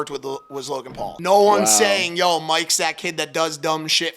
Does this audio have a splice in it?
yes; 1 cut; at 1.1 s

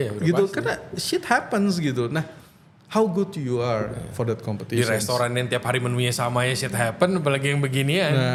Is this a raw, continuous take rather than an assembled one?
yes; 0 cuts

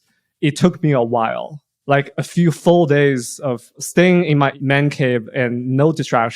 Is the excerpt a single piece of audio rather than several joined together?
no; 2 cuts; at 3.8 s, 4.6 s

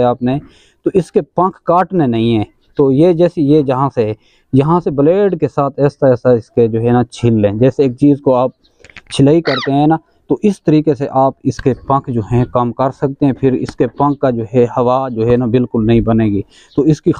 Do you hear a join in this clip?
no; 0 cuts

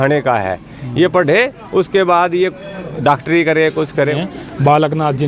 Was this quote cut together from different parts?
yes; 1 cut; at 4.2 s

